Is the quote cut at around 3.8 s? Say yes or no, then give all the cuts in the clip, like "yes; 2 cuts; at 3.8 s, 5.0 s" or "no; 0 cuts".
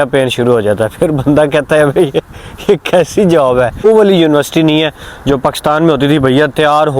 yes; 1 cut; at 3.8 s